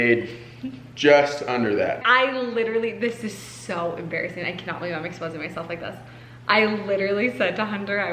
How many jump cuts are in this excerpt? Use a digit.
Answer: 1